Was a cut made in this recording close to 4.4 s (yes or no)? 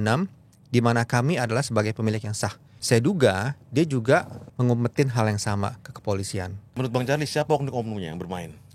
yes